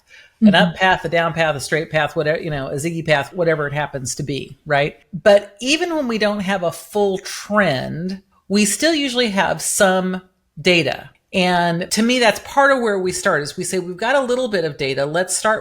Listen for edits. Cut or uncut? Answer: cut